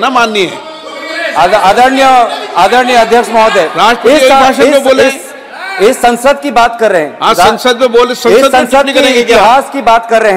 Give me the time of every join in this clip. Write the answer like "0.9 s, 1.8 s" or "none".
none